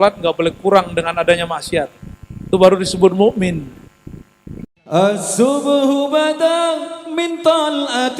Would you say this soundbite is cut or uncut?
cut